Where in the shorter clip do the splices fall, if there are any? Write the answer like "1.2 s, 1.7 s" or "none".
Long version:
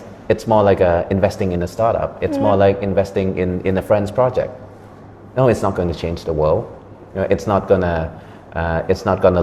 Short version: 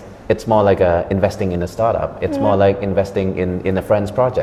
none